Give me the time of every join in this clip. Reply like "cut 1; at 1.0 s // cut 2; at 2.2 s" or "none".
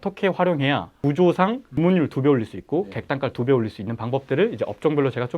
cut 1; at 1.7 s